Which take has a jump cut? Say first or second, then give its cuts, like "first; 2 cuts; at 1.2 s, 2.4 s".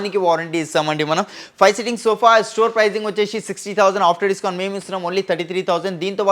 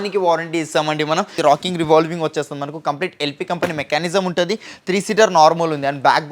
second; 1 cut; at 1.4 s